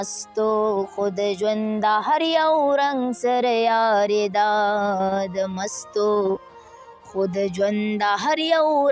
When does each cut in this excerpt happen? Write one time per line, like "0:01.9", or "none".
none